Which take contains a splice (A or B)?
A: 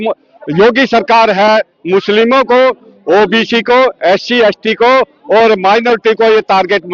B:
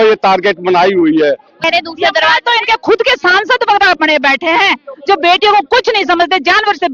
B